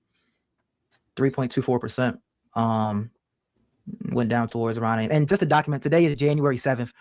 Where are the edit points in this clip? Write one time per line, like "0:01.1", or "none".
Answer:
none